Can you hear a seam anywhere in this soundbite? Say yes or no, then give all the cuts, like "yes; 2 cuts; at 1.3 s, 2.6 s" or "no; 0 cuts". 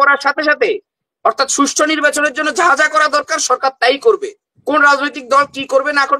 no; 0 cuts